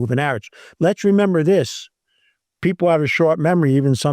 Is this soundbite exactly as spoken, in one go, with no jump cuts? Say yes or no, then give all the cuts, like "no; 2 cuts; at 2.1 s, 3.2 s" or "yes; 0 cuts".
yes; 0 cuts